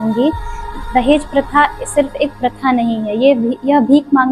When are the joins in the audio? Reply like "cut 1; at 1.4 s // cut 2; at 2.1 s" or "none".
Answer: none

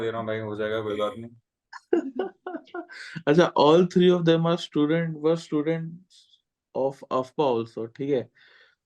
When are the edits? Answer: none

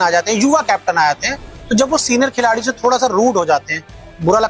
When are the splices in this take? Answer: none

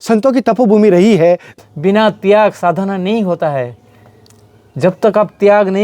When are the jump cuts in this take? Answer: cut 1; at 1.5 s

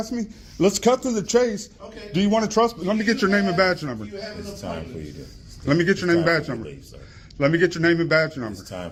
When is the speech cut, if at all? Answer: none

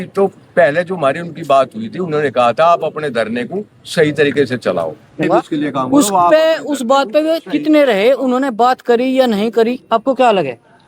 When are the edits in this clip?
cut 1; at 5.2 s

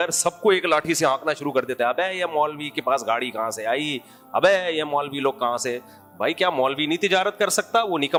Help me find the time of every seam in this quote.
none

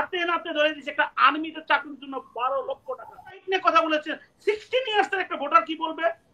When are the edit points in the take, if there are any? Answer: cut 1; at 3.4 s

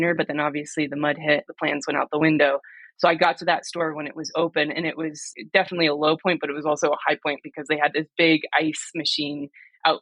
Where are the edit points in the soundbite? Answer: cut 1; at 1.5 s // cut 2; at 5.2 s

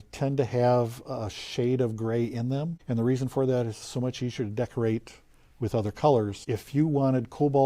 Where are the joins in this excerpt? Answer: cut 1; at 2.8 s // cut 2; at 6.4 s

